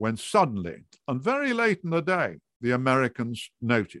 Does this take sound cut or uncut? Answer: uncut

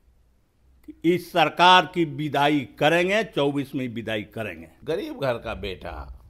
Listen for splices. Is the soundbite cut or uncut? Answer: cut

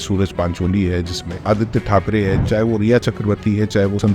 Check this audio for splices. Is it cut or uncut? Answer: cut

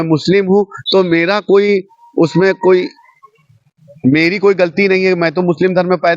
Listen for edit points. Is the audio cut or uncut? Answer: uncut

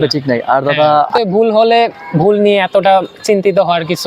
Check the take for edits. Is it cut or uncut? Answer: cut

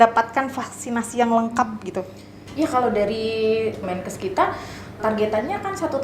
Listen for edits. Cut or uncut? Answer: cut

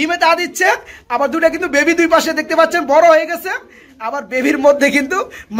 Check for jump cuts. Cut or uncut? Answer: uncut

